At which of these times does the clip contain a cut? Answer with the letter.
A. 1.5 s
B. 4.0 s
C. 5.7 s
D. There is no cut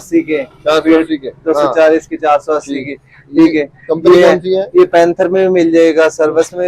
D